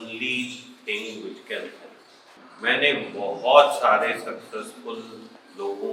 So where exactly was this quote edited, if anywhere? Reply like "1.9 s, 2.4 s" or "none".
2.4 s